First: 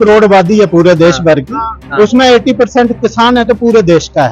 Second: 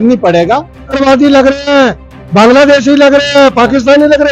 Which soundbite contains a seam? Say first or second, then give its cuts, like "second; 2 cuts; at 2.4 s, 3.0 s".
second; 1 cut; at 1.0 s